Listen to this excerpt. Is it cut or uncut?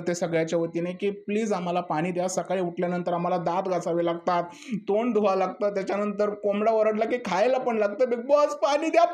uncut